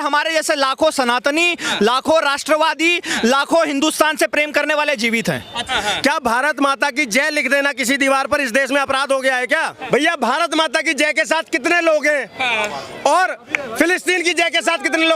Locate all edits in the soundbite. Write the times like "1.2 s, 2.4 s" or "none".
5.6 s, 9.7 s